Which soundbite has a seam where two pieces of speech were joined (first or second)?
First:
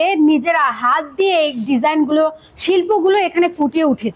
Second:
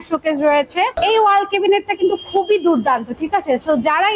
second